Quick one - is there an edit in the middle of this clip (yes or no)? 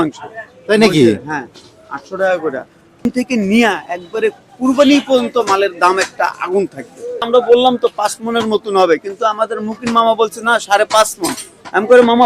yes